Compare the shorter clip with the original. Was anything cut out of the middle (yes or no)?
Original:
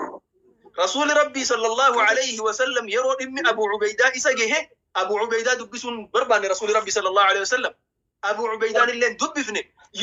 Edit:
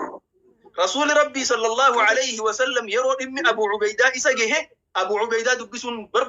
no